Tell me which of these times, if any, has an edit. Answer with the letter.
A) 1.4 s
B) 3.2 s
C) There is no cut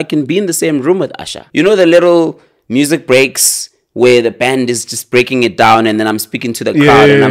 A